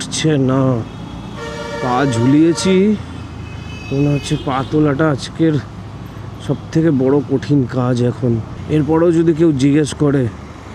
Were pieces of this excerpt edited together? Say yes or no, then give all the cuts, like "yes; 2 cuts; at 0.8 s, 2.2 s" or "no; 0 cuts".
no; 0 cuts